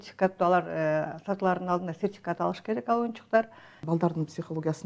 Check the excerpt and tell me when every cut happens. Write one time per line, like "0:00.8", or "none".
0:03.8